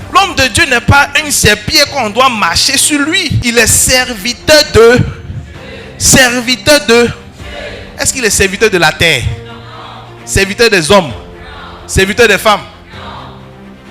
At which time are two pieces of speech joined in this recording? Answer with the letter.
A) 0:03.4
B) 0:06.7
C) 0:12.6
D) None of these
A